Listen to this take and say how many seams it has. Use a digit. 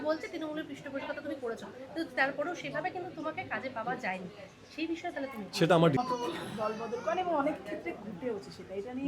1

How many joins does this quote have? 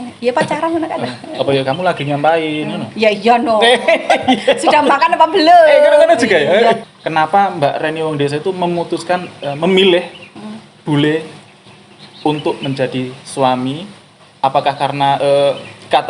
1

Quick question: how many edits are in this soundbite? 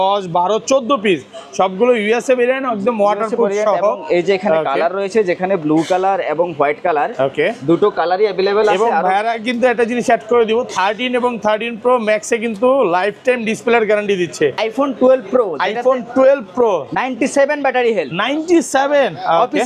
1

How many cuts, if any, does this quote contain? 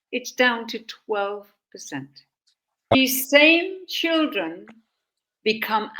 1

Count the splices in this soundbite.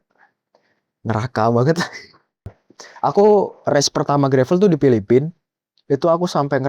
1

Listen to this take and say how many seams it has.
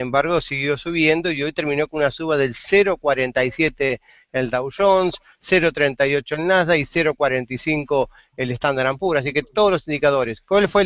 0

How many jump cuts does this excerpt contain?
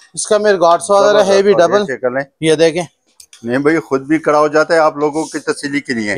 0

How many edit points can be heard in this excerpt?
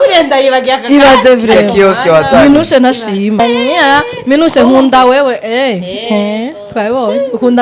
1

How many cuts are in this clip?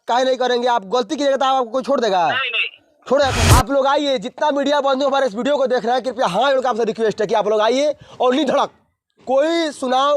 1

